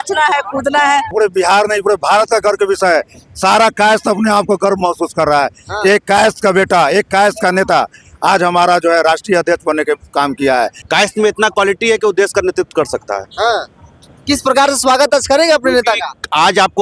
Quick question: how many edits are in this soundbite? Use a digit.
2